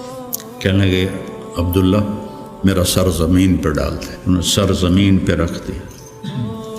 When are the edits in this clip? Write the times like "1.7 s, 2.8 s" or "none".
4.1 s

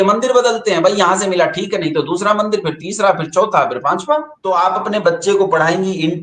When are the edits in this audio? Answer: 4.3 s

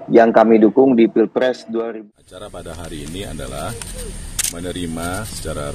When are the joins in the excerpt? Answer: 1.7 s

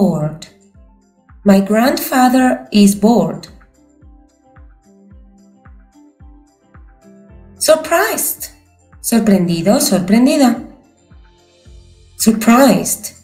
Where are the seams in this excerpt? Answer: none

